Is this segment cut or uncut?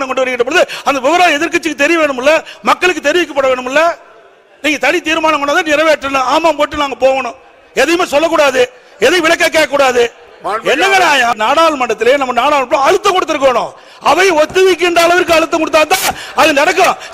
cut